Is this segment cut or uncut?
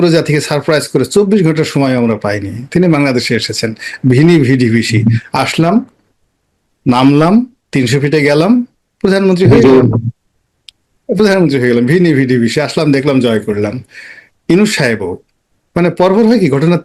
uncut